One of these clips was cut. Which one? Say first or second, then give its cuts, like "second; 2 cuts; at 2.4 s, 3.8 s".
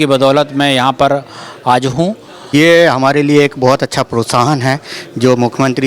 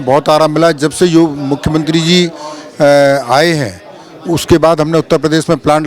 first; 1 cut; at 2.4 s